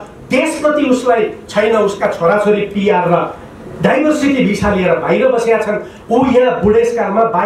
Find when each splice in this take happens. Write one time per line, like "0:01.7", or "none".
none